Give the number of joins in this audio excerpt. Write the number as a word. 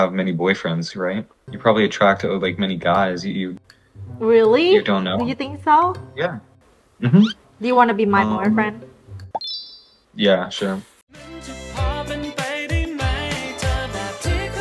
two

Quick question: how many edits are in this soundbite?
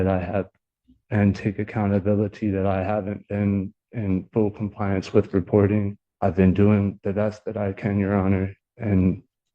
one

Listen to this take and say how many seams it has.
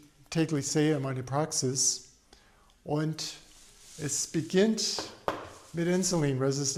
zero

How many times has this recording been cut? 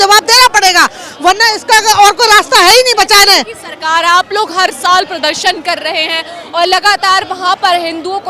zero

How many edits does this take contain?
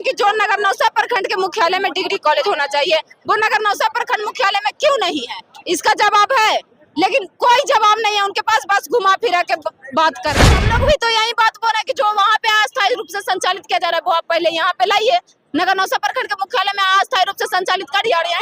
one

